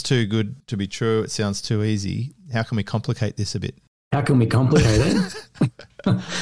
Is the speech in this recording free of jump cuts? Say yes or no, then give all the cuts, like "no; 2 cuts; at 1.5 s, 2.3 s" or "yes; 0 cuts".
yes; 0 cuts